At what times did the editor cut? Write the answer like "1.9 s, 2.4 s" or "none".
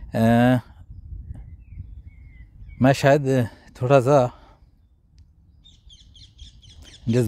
none